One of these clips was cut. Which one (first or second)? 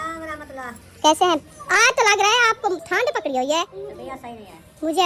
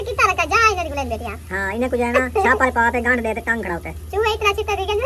first